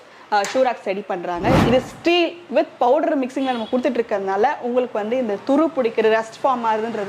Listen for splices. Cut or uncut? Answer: cut